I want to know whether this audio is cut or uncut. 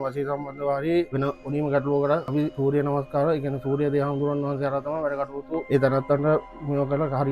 cut